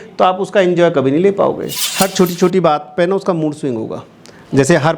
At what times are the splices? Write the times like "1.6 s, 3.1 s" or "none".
1.7 s